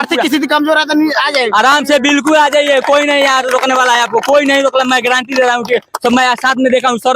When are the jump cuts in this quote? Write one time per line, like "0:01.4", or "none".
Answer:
none